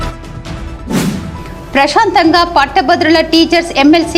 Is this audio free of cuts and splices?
no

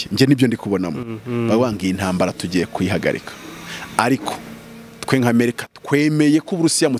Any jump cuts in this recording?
no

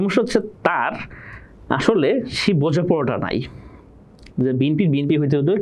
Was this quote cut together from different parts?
no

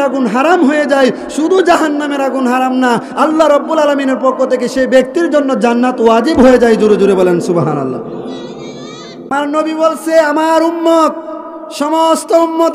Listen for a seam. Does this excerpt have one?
yes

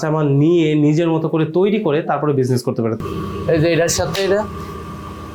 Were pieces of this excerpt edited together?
yes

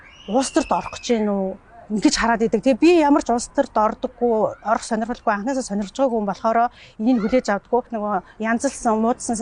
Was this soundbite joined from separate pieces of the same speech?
yes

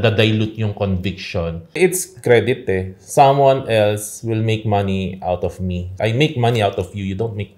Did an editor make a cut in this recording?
yes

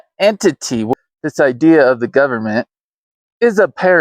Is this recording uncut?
no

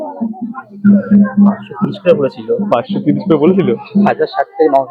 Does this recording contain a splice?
no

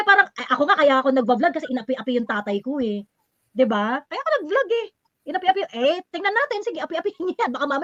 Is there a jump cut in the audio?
no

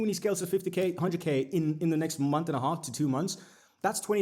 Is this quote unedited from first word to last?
yes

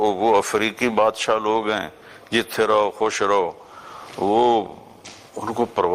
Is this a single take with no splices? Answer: yes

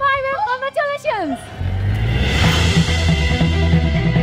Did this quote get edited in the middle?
no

